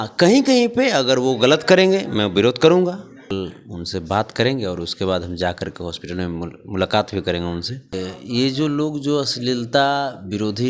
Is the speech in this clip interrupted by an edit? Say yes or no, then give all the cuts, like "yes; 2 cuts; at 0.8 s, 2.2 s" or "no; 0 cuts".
yes; 2 cuts; at 3.3 s, 7.9 s